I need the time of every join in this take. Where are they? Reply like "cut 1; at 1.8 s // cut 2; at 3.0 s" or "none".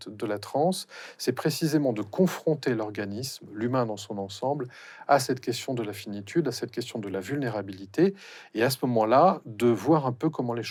none